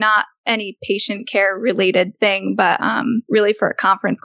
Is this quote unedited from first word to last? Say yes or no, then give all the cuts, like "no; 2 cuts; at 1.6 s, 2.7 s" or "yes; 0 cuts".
no; 2 cuts; at 2.1 s, 3.2 s